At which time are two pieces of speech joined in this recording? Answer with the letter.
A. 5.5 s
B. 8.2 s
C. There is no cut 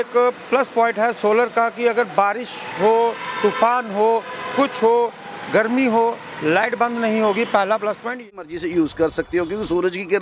B